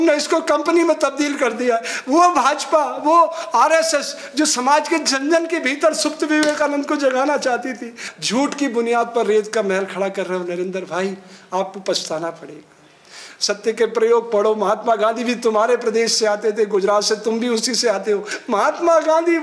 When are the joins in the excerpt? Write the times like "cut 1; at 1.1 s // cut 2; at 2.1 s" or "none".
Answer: none